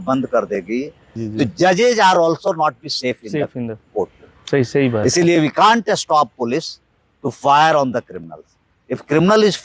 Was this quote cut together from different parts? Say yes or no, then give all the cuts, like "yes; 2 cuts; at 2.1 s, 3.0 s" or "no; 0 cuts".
yes; 1 cut; at 1.2 s